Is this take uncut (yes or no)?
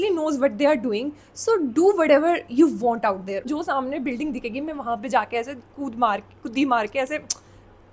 no